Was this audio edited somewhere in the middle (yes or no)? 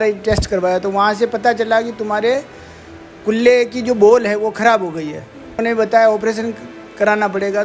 yes